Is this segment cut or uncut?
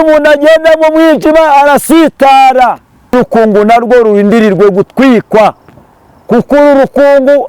cut